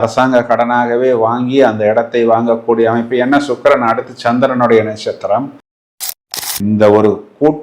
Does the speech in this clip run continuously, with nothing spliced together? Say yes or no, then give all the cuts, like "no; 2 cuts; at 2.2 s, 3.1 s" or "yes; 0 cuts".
no; 1 cut; at 5.9 s